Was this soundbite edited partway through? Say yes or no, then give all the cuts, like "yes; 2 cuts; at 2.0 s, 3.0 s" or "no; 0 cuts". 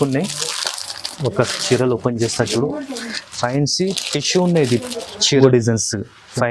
yes; 1 cut; at 5.4 s